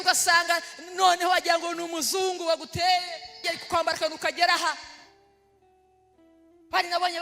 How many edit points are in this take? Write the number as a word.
one